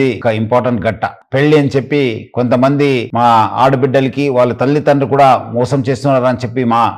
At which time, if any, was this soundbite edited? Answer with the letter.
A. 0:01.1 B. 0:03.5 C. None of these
A